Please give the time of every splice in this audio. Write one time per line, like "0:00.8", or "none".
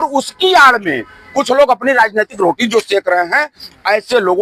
none